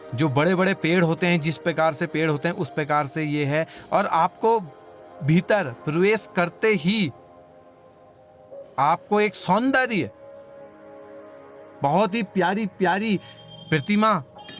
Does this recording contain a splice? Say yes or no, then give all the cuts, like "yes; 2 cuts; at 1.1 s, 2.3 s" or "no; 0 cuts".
no; 0 cuts